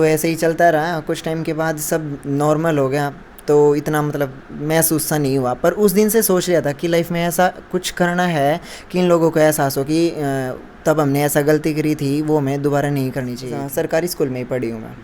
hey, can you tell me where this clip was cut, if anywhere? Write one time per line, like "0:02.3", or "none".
0:13.5